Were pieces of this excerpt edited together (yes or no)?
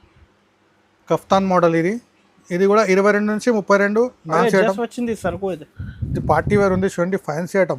yes